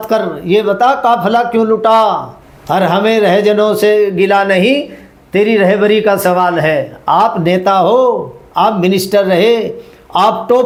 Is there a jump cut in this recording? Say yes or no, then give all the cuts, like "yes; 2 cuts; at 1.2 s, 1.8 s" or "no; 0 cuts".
no; 0 cuts